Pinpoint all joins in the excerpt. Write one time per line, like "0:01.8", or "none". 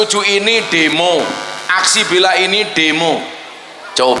0:01.5